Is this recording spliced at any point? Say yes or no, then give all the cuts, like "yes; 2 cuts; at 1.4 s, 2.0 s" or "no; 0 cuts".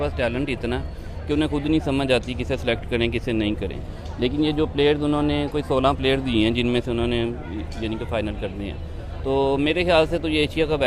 no; 0 cuts